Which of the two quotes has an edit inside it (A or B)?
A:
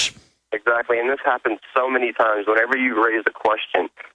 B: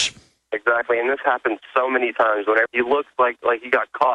A